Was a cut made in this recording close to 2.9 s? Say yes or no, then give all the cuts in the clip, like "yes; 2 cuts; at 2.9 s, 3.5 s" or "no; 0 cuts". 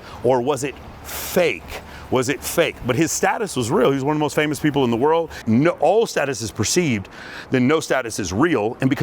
no; 1 cut; at 5.3 s